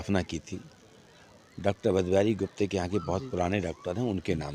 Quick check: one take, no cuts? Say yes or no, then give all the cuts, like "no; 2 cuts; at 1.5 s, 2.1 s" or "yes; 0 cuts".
yes; 0 cuts